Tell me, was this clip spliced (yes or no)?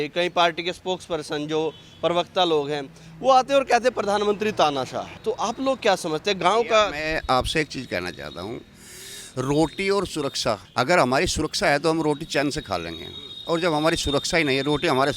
yes